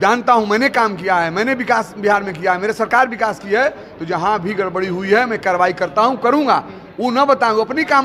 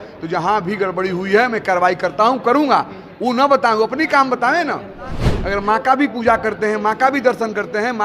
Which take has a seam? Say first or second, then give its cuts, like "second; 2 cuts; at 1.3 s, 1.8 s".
second; 1 cut; at 5.3 s